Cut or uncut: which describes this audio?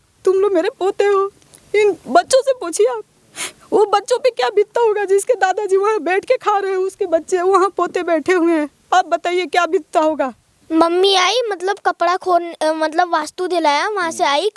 cut